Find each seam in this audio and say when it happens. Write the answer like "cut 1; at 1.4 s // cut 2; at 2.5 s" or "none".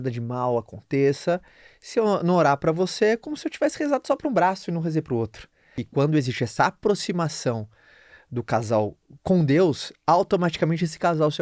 cut 1; at 5.7 s // cut 2; at 9.1 s